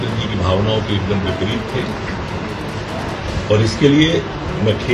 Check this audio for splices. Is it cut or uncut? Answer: uncut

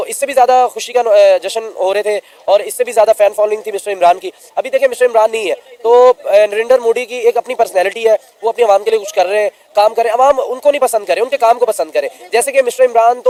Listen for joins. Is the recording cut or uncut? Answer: uncut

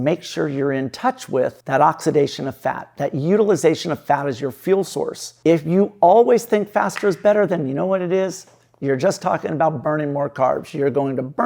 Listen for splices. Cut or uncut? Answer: cut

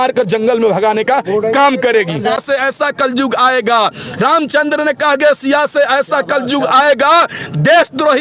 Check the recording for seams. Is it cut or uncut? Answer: cut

